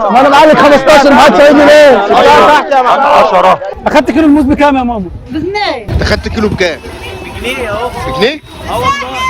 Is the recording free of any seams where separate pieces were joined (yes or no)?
no